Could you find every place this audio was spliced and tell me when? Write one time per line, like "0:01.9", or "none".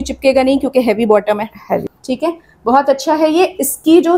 0:02.0